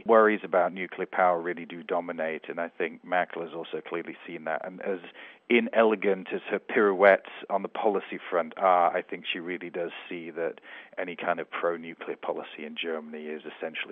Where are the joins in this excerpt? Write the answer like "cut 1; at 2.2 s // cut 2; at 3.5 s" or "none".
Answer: none